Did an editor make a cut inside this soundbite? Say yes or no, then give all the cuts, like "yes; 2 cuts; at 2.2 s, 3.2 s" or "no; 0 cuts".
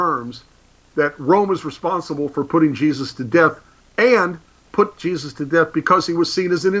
no; 0 cuts